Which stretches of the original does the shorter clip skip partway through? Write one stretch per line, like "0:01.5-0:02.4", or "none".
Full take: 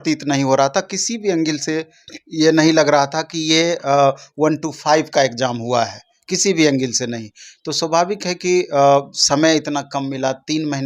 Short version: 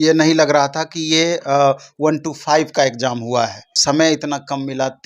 0:06.1-0:09.2